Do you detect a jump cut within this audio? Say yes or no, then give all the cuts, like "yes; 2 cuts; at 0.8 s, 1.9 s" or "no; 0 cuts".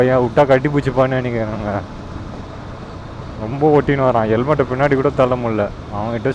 no; 0 cuts